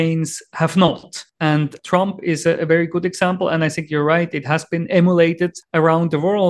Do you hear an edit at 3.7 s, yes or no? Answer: no